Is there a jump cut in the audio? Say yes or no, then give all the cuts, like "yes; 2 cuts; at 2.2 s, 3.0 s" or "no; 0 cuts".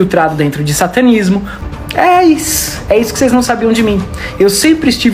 yes; 1 cut; at 1.5 s